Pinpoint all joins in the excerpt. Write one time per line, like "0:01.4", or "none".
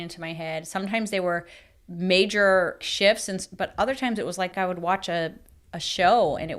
none